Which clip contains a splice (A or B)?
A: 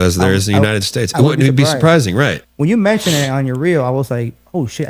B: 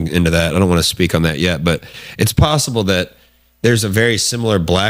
A